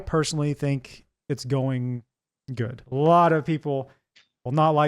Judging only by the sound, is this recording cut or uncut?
cut